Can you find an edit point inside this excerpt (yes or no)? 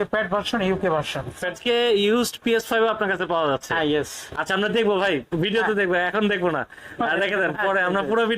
yes